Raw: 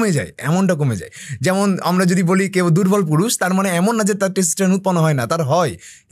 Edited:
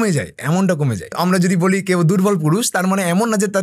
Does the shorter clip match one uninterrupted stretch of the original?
no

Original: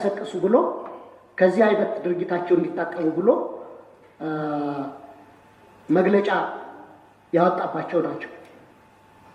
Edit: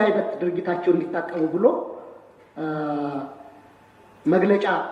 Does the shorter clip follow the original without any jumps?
yes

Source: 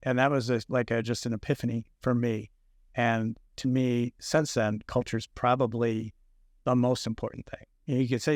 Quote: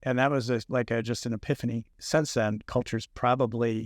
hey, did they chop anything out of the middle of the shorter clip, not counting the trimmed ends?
yes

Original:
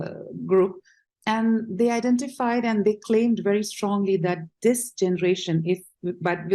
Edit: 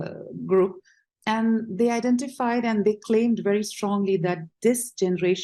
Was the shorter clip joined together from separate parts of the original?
no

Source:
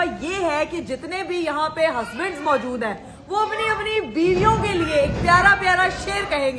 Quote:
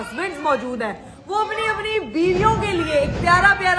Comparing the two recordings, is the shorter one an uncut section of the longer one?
yes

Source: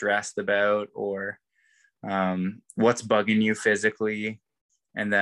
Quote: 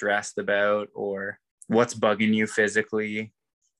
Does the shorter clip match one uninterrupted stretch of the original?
no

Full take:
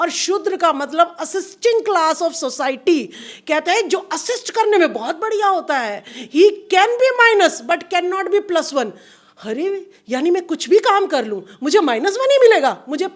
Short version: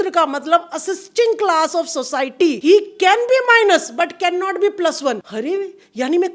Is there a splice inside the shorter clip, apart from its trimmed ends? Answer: yes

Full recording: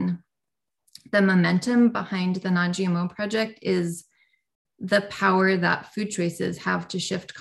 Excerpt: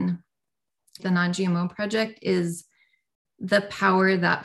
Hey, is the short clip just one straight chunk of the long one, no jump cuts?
no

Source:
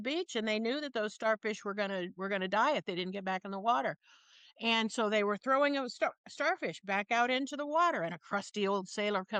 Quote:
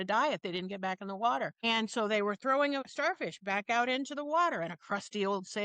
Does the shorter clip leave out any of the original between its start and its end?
yes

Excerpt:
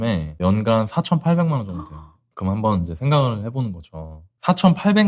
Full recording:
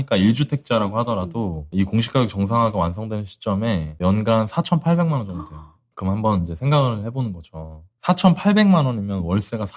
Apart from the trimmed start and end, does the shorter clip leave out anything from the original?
no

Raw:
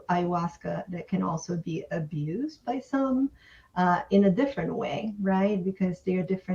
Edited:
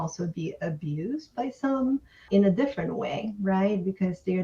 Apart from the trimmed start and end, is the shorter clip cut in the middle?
yes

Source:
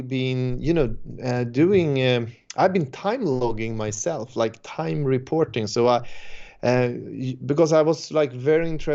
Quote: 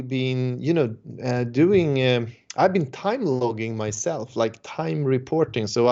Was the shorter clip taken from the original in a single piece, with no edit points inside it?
yes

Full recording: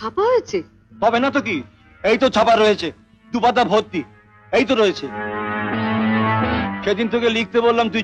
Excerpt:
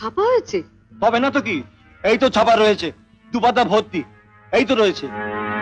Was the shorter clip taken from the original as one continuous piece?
yes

